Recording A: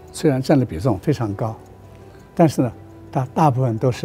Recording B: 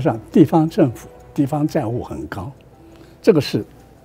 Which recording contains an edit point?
B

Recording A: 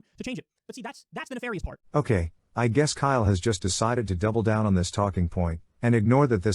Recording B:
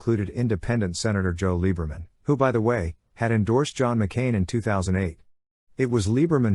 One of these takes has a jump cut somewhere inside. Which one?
A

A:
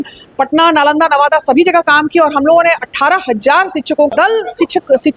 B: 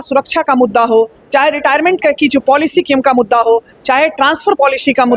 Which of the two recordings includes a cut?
A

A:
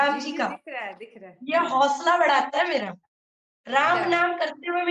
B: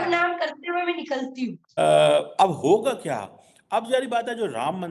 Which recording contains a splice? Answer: B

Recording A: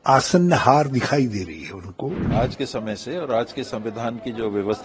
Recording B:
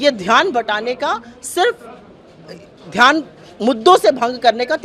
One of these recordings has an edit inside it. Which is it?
A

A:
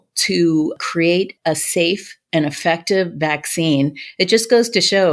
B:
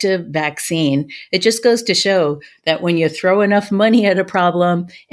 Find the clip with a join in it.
A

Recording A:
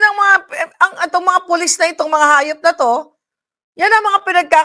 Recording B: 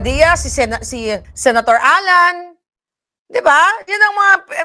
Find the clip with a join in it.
B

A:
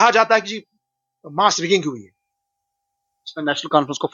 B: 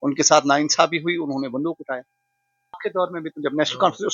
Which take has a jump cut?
B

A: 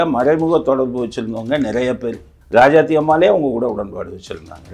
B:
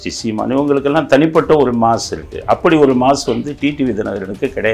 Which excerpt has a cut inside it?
A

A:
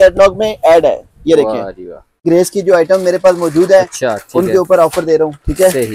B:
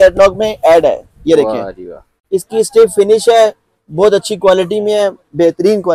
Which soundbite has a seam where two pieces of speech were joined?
A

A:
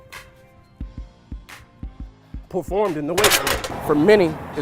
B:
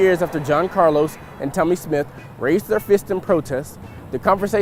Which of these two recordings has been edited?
A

